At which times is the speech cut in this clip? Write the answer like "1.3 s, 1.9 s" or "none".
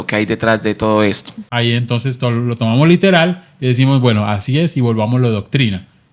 1.4 s